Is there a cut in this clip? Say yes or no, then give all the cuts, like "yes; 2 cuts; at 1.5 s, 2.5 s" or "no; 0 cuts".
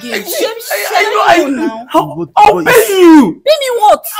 no; 0 cuts